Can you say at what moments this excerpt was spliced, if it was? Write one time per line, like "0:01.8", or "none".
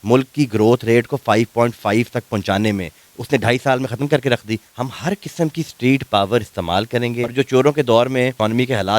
0:04.7
0:07.3